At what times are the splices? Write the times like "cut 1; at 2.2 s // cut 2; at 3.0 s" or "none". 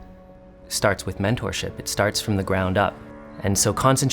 cut 1; at 3.0 s